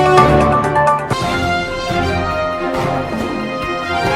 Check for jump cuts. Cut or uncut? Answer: cut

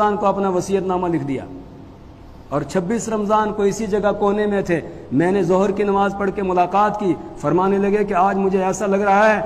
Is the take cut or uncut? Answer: uncut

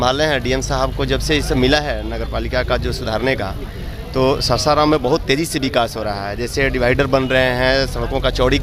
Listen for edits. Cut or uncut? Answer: uncut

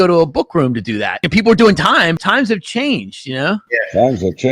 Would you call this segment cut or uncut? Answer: cut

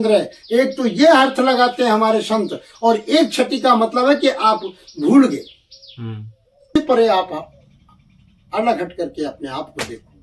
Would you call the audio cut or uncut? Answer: cut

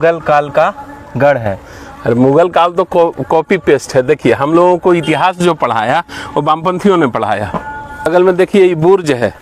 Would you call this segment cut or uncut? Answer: cut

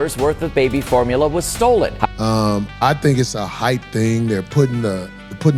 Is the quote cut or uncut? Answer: cut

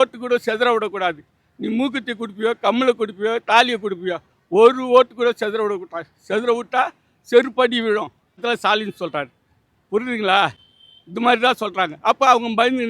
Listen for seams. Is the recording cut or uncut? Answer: cut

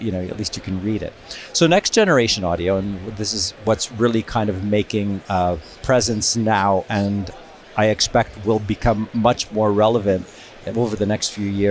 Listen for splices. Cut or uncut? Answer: uncut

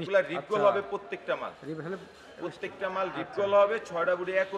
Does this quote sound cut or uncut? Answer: uncut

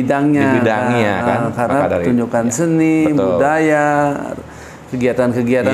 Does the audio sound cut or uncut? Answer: uncut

